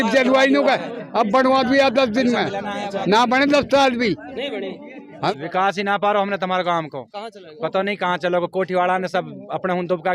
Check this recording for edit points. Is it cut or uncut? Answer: cut